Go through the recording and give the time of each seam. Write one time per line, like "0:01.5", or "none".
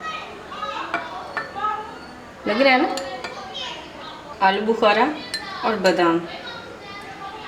0:04.2

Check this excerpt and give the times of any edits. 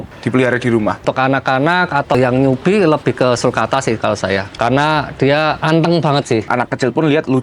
0:01.0
0:02.1
0:04.5
0:05.6
0:06.5

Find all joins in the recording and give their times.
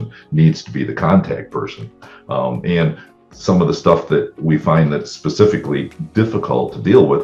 none

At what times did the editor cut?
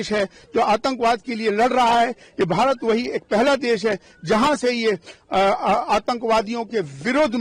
none

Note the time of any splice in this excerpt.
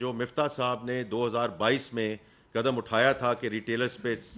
none

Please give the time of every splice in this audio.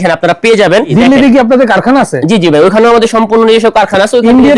0:00.9

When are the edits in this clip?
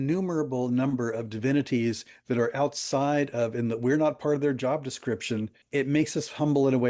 0:05.6

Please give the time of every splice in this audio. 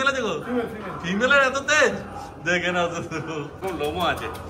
0:03.6

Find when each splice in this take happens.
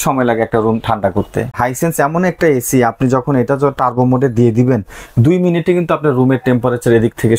0:01.5

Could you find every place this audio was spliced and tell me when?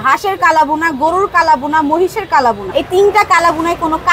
0:02.6

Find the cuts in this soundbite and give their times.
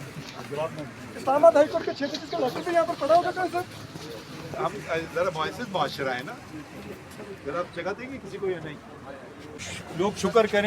0:04.6
0:09.7

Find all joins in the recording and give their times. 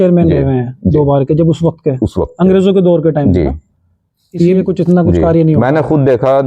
0:04.6

